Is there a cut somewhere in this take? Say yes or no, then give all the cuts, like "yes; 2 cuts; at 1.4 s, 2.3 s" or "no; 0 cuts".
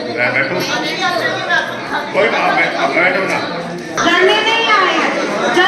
yes; 1 cut; at 4.0 s